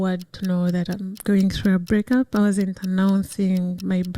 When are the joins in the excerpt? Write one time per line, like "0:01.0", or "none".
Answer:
none